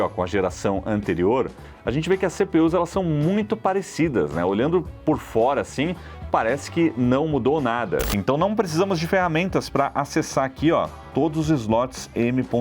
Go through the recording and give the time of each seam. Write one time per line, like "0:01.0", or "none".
0:08.1